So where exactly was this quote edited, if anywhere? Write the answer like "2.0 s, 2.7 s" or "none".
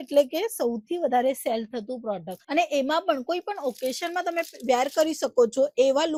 none